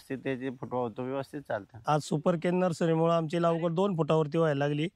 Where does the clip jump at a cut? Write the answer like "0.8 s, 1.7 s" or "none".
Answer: 1.7 s